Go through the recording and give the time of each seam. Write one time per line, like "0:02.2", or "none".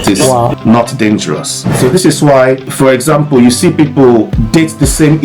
0:01.7
0:02.7
0:04.4